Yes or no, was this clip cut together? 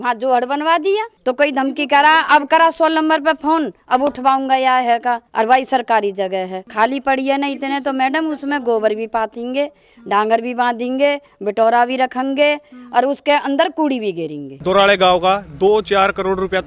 yes